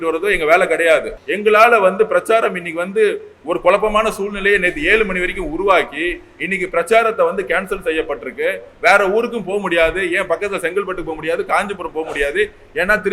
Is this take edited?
yes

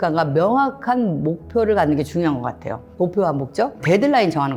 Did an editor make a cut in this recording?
no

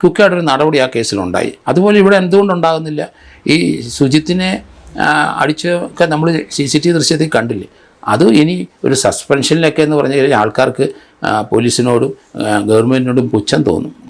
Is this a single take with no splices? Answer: yes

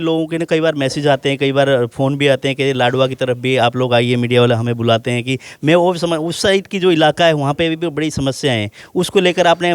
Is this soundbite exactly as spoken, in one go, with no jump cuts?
yes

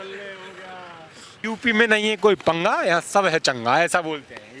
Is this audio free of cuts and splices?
no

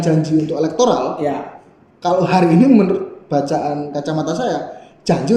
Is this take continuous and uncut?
yes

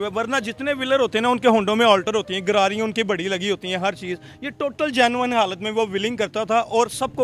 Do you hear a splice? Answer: no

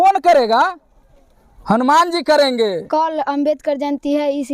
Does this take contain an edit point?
yes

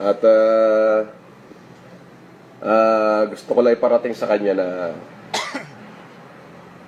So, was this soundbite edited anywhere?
no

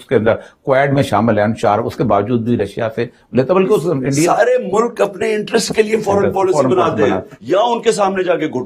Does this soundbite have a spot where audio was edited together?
no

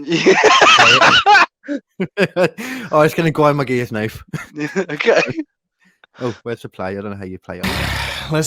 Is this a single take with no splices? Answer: yes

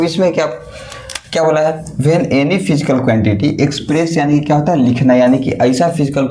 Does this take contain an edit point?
no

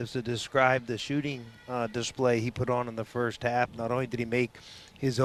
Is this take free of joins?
yes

